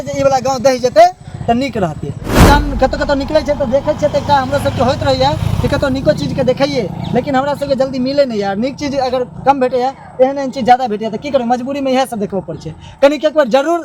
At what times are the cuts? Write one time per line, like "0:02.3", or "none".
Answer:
0:02.4